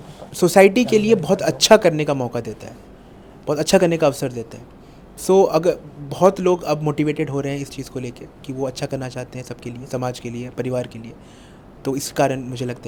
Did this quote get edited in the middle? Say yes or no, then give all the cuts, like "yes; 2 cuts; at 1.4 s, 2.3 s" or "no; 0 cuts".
no; 0 cuts